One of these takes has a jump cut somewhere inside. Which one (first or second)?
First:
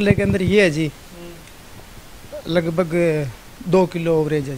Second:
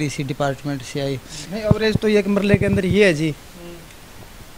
second